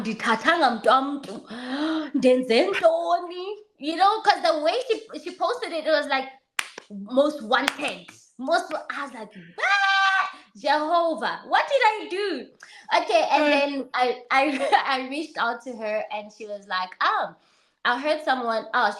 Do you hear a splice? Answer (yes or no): no